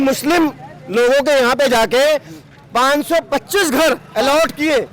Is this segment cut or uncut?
uncut